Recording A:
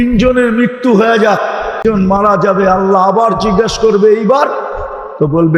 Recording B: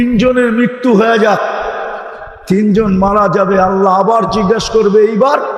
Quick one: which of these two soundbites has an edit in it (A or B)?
A